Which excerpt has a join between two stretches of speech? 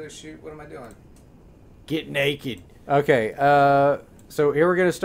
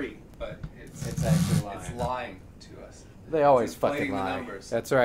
second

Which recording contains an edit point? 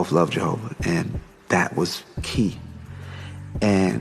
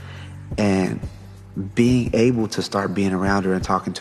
first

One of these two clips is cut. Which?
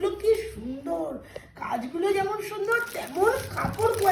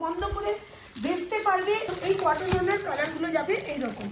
second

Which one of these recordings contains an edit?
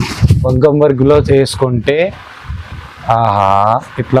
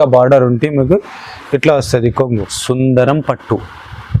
second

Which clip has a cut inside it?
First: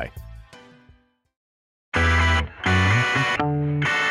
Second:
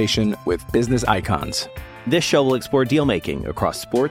first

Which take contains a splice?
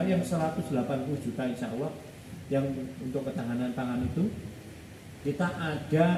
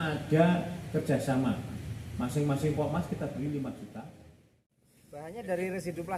second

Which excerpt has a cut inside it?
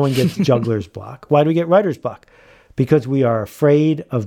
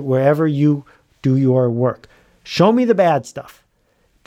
first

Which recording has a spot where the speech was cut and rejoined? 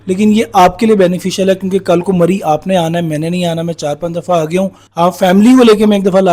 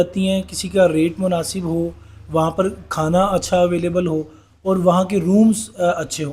first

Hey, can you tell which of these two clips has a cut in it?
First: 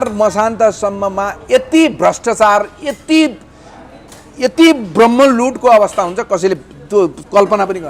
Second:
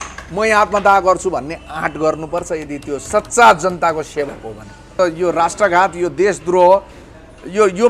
second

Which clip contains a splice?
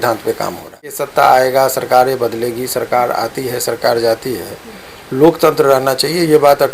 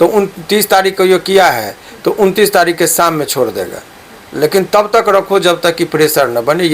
first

